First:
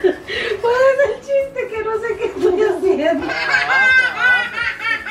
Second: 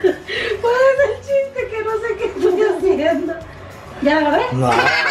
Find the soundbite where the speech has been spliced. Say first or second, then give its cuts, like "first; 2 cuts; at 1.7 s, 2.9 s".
first; 1 cut; at 3.5 s